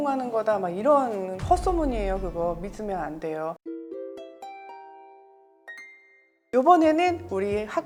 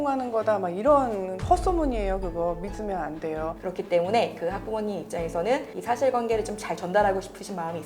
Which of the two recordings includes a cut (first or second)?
second